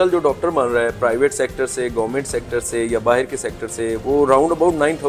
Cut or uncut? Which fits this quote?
uncut